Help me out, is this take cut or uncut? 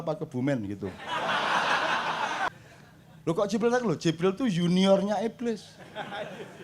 cut